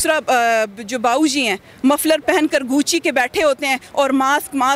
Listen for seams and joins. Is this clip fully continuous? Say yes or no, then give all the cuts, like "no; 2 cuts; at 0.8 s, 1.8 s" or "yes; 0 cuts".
yes; 0 cuts